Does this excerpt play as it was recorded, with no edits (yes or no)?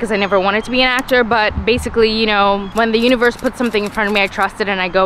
yes